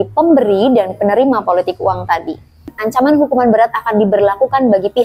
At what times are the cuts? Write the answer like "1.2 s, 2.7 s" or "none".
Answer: 2.7 s